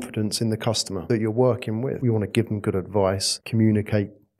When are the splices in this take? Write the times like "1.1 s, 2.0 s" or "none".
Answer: 1.0 s, 2.0 s, 3.3 s